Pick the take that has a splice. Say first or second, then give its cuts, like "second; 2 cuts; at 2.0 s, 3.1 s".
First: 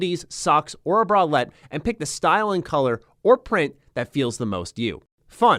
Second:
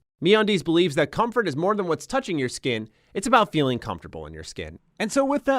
second; 1 cut; at 4.7 s